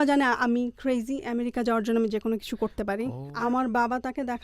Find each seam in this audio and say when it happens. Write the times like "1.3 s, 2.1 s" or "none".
3.2 s

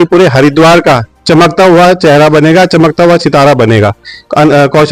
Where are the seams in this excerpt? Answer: none

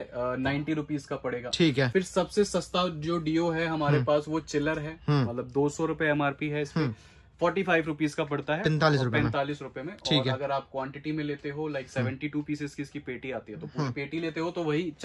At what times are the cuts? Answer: none

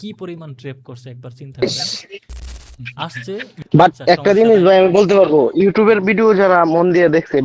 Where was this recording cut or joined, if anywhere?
3.6 s

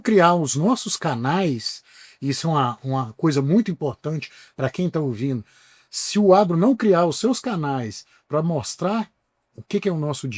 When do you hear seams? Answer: none

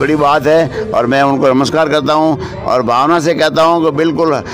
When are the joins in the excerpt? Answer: none

